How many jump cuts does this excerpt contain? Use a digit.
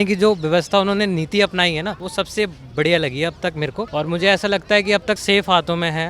3